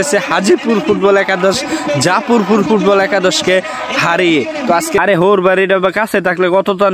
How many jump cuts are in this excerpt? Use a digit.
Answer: 1